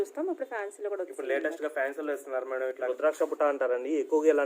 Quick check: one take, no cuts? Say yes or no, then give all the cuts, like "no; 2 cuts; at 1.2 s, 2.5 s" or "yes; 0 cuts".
no; 1 cut; at 2.8 s